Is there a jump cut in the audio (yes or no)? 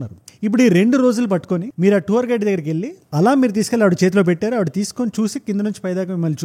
no